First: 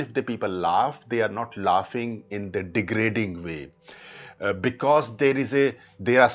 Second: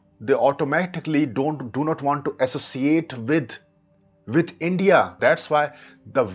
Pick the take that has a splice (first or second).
second